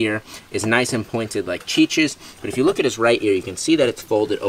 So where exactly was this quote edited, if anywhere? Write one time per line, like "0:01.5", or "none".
none